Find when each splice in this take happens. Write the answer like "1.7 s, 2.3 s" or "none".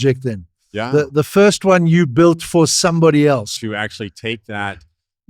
3.5 s